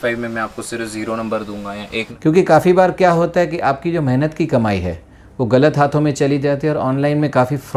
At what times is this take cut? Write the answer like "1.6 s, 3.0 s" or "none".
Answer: 2.1 s